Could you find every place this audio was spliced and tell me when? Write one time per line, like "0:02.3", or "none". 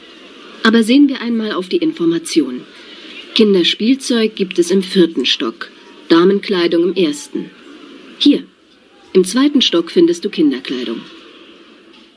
0:11.0